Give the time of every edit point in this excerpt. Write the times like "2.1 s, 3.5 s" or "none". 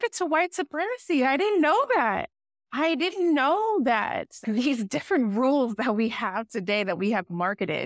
none